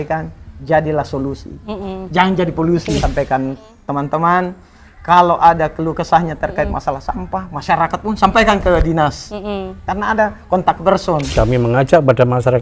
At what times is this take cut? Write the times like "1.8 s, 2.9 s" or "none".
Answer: 3.0 s, 9.9 s, 11.3 s